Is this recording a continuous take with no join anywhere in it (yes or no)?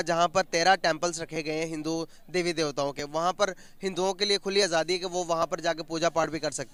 yes